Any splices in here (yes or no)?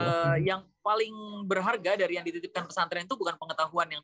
no